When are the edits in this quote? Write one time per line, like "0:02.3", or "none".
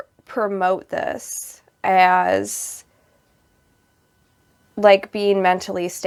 none